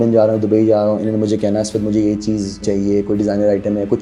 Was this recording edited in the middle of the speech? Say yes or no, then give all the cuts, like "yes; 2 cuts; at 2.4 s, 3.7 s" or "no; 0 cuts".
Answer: yes; 1 cut; at 2.6 s